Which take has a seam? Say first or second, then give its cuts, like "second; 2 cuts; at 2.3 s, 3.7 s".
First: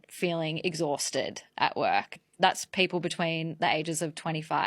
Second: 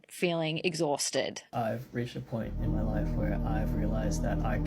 second; 1 cut; at 1.4 s